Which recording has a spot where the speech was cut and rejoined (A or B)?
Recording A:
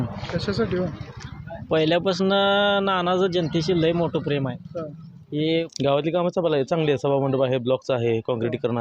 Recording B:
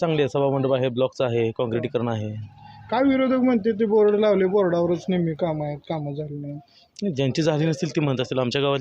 A